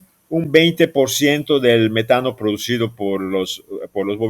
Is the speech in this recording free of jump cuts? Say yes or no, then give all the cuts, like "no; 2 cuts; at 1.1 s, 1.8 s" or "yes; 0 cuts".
yes; 0 cuts